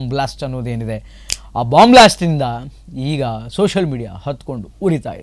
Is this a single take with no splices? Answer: yes; 0 cuts

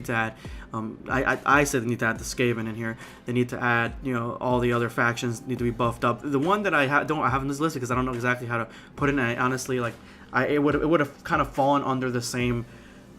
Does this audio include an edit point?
yes; 1 cut; at 8.4 s

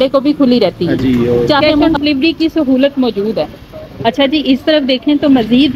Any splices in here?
yes; 1 cut; at 1.7 s

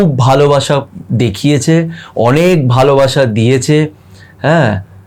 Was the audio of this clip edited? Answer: no; 0 cuts

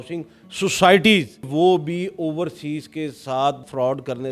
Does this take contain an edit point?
yes; 1 cut; at 1.5 s

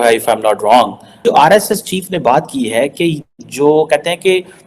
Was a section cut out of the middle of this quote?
yes; 1 cut; at 1.2 s

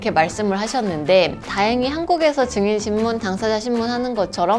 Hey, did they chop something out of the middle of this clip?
yes; 1 cut; at 1.4 s

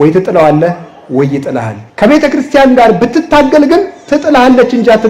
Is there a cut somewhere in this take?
yes; 1 cut; at 1.8 s

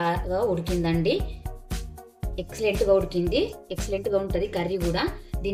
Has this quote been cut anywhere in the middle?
no; 0 cuts

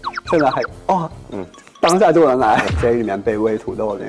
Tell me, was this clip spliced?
yes; 1 cut; at 2.7 s

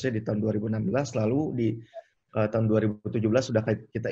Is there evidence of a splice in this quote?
no; 0 cuts

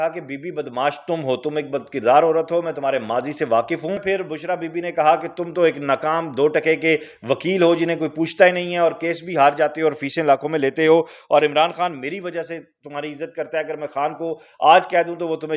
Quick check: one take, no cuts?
no; 1 cut; at 4.0 s

